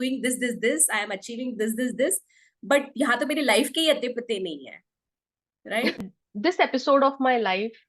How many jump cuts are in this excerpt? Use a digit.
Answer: 1